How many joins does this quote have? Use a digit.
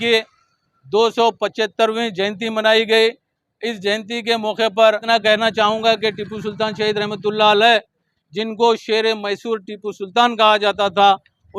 1